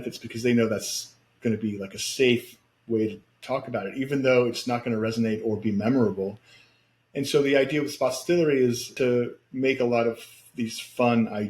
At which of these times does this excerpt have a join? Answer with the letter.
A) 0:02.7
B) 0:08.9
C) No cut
B